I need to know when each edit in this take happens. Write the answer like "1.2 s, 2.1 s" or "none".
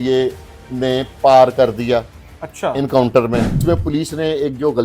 3.5 s